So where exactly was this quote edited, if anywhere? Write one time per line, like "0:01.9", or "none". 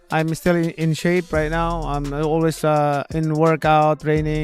none